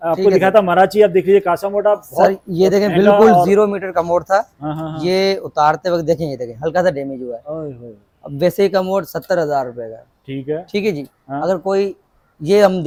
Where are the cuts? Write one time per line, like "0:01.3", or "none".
none